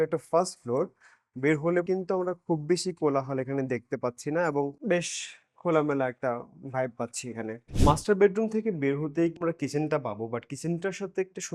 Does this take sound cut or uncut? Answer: uncut